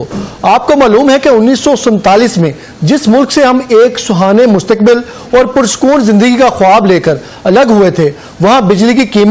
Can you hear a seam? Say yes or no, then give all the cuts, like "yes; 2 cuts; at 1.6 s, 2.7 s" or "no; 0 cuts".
no; 0 cuts